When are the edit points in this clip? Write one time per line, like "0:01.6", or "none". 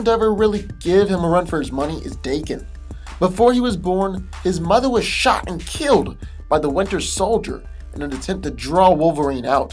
none